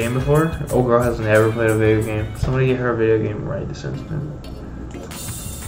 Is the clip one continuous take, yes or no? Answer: yes